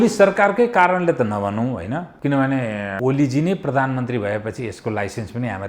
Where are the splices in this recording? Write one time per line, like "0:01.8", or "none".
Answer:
0:02.1
0:03.0